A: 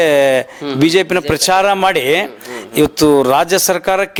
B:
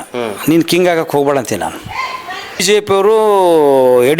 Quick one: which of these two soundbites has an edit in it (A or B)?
B